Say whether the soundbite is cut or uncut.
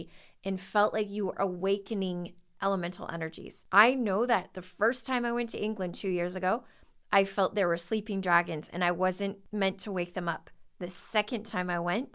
cut